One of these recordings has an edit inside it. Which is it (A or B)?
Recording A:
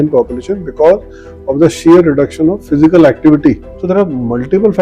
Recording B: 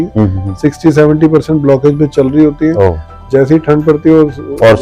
A